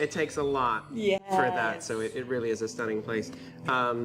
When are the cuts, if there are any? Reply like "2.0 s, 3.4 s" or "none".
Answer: none